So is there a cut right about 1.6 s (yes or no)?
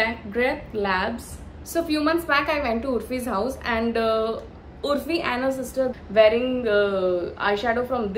yes